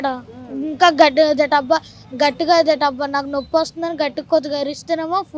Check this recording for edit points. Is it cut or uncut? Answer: uncut